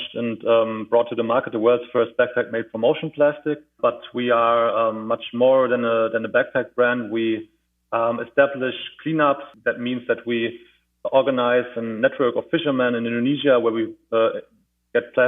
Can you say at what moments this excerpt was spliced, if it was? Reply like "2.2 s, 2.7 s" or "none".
3.7 s, 9.5 s